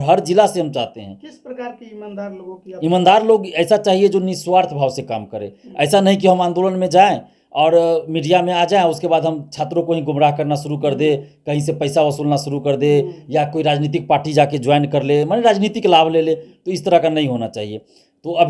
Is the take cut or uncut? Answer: uncut